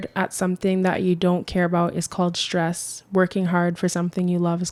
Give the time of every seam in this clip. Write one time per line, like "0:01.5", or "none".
none